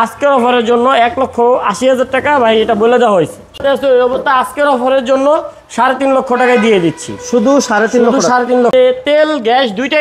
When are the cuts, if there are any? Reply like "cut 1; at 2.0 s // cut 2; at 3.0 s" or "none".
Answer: cut 1; at 3.6 s // cut 2; at 8.7 s